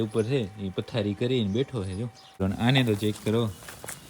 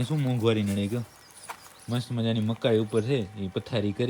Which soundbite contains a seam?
first; 1 cut; at 2.4 s

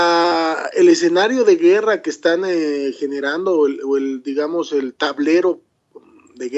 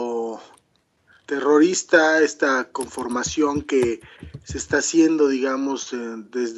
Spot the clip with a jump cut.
second; 1 cut; at 3.7 s

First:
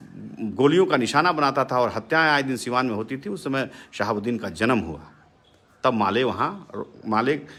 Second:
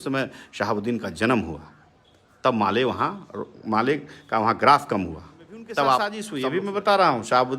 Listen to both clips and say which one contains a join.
second; 1 cut; at 6.2 s

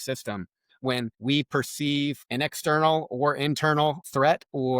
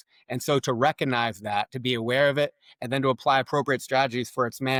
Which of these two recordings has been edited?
first; 3 cuts; at 1.1 s, 2.2 s, 4.0 s

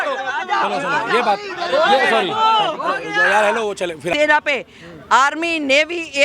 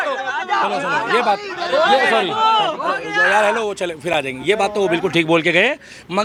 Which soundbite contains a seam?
first; 1 cut; at 4.1 s

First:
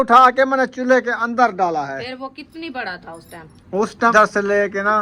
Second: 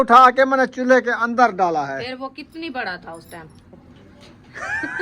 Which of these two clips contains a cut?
second; 1 cut; at 3.6 s

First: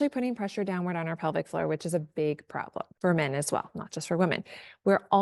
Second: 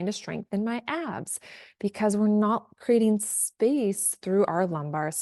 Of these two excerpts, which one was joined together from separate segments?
first; 1 cut; at 2.8 s

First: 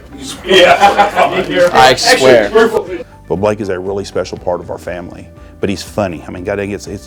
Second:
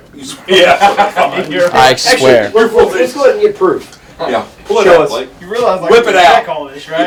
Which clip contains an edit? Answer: first; 1 cut; at 2.7 s

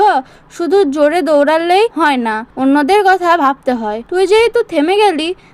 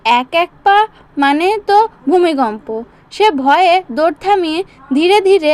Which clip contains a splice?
first; 2 cuts; at 2.0 s, 4.0 s

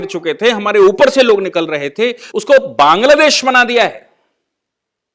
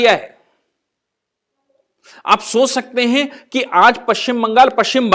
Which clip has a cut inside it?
first; 1 cut; at 2.2 s

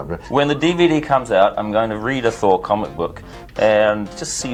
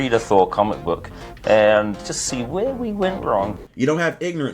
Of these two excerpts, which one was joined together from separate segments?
second; 1 cut; at 3.5 s

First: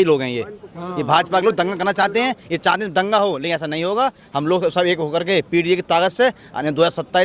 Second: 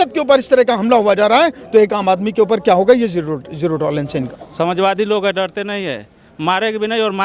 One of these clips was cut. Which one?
second; 1 cut; at 4.4 s

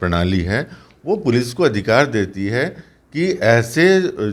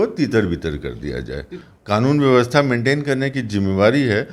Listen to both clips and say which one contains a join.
second; 1 cut; at 1.6 s

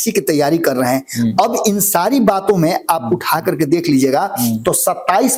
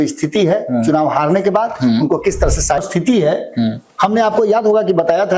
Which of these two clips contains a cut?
second; 1 cut; at 2.8 s

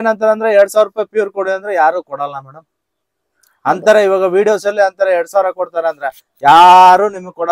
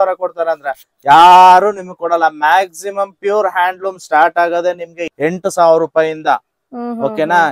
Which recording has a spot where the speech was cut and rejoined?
second; 1 cut; at 5.0 s

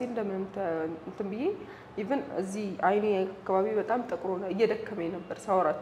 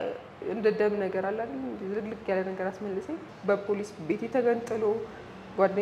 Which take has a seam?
second; 1 cut; at 3.3 s

